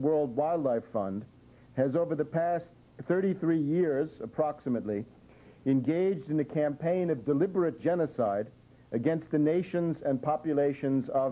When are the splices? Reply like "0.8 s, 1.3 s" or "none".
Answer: 9.5 s